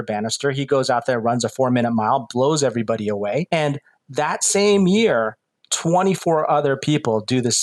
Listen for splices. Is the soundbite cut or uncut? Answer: cut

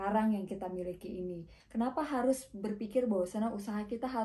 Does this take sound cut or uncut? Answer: cut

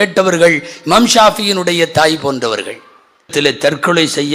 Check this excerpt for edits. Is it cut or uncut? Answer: cut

